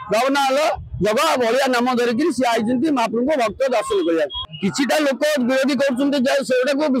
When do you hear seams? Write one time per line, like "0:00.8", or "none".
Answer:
0:04.4

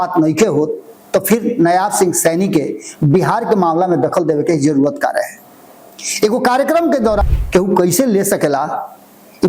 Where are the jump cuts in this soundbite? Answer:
0:07.2

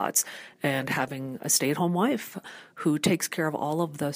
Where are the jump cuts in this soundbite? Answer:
0:02.4

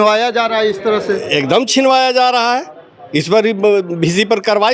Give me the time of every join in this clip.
none

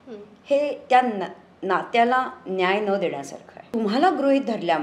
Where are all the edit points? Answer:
0:03.6

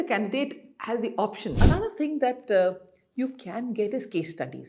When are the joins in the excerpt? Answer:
0:01.6

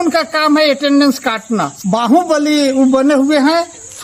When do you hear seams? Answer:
0:01.7

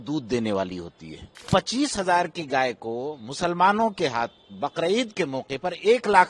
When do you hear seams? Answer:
0:01.5

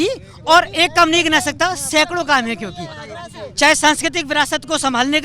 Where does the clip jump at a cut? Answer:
none

